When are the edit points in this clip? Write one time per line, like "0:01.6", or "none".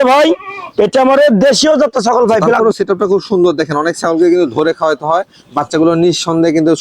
0:02.6